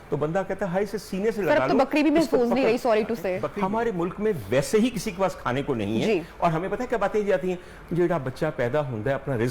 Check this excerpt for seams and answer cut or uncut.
cut